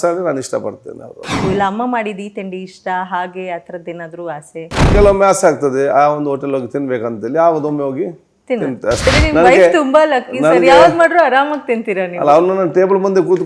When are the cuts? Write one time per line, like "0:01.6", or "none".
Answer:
0:01.4
0:04.9
0:09.1